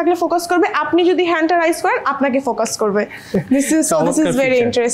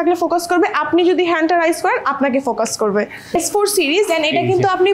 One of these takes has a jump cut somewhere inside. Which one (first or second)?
second